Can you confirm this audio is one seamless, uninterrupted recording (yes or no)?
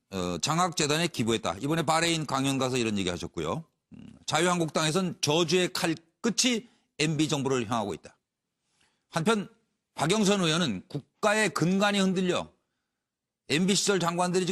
no